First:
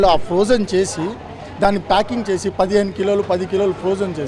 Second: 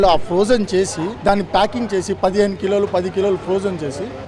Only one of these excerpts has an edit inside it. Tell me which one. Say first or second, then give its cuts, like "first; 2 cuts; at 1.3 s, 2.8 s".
second; 1 cut; at 1.1 s